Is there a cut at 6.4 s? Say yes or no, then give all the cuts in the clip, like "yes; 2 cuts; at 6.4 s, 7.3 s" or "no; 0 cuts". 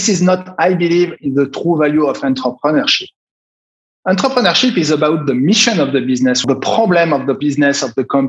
yes; 2 cuts; at 6.4 s, 7.4 s